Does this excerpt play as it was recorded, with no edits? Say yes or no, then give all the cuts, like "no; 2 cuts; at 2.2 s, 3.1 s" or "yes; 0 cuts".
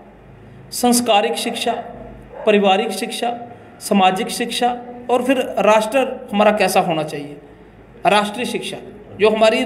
yes; 0 cuts